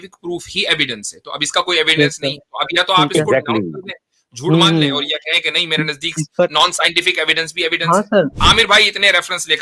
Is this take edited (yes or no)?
yes